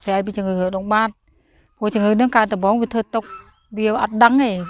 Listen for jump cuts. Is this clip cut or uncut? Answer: uncut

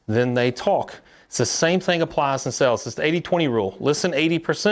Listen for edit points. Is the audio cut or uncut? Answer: uncut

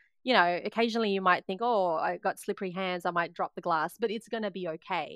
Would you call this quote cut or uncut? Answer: uncut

